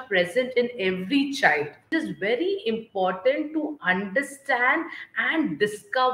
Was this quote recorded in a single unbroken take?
no; 1 cut; at 1.8 s

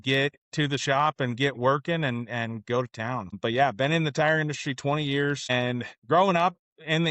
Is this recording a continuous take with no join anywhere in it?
no; 2 cuts; at 3.3 s, 5.5 s

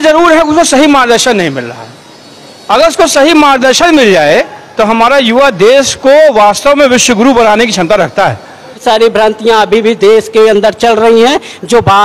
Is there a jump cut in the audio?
yes; 1 cut; at 8.8 s

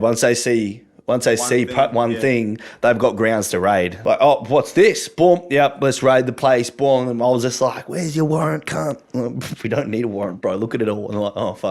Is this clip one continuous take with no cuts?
no; 1 cut; at 3.9 s

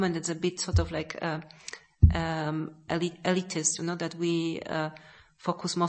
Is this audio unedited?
yes; 0 cuts

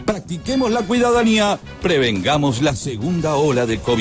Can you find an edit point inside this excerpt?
yes; 1 cut; at 1.7 s

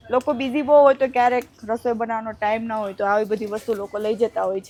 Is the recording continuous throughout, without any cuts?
yes; 0 cuts

